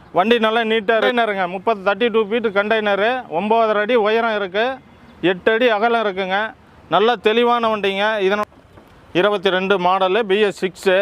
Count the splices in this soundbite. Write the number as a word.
two